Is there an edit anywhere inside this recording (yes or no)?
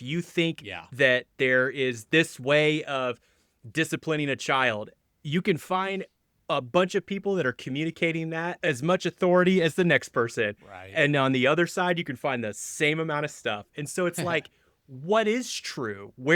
yes